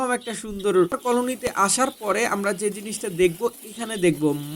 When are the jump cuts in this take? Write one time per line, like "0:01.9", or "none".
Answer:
0:01.0